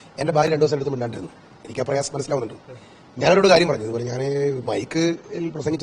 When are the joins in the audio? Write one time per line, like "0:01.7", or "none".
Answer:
none